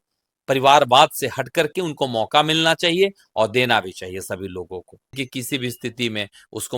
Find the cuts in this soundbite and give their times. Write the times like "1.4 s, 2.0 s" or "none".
5.2 s

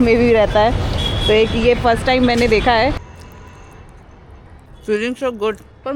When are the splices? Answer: 3.1 s, 4.7 s

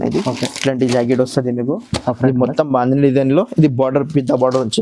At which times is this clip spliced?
none

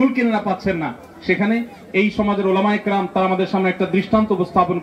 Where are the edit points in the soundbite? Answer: none

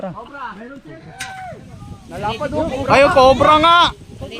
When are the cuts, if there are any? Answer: 1.6 s

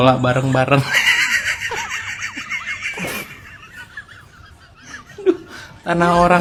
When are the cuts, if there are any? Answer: none

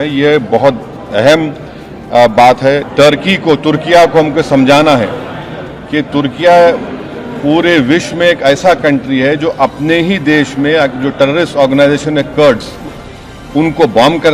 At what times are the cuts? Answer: 2.9 s

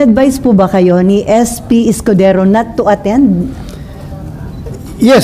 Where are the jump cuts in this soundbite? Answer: none

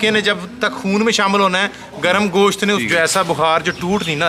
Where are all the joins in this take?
2.8 s

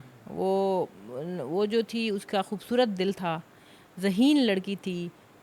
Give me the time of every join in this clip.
none

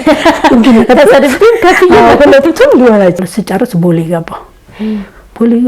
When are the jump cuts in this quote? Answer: 3.2 s

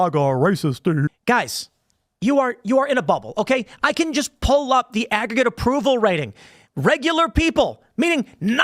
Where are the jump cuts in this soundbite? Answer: 1.1 s

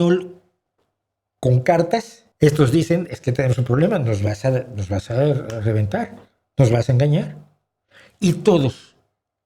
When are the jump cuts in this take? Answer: 2.2 s

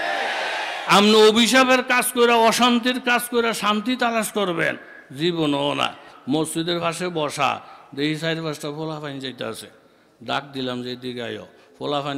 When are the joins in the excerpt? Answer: 6.1 s

